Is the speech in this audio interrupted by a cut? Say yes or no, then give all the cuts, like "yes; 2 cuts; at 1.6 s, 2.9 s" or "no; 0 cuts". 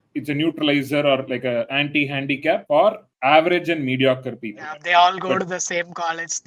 yes; 1 cut; at 4.8 s